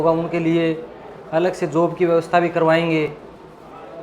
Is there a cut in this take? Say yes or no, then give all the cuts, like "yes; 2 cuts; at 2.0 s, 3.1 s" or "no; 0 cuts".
no; 0 cuts